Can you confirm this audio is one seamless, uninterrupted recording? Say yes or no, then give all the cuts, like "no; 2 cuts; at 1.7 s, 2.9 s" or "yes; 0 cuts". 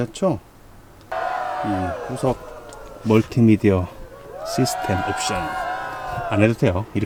yes; 0 cuts